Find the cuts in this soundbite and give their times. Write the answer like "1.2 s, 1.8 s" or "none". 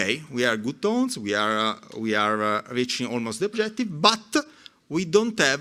none